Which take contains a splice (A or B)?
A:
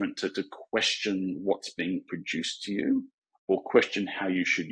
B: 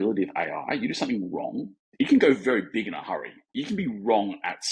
B